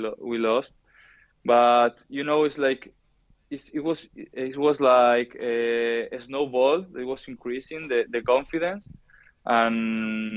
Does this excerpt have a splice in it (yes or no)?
no